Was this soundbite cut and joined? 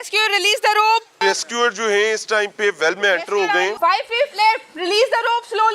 yes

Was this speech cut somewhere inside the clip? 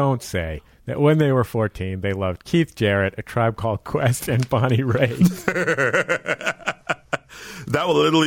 no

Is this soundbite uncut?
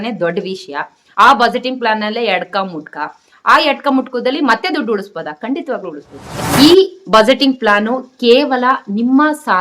no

